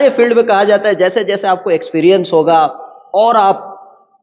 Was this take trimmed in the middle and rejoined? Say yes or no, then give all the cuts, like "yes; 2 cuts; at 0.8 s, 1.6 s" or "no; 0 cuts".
no; 0 cuts